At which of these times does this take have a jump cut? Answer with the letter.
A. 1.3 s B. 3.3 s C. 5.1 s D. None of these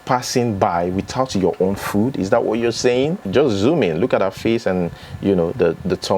B